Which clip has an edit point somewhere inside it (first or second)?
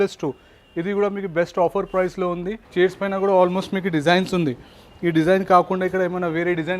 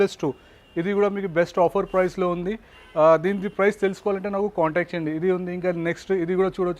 first